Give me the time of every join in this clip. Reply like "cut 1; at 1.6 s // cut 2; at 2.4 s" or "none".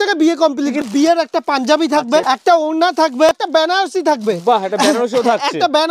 cut 1; at 0.8 s // cut 2; at 2.2 s // cut 3; at 3.4 s